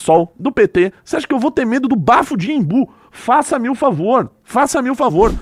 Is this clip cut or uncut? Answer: uncut